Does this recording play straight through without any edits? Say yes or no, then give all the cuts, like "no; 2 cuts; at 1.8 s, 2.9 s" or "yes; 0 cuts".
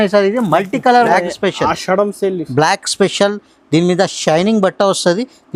no; 1 cut; at 1.1 s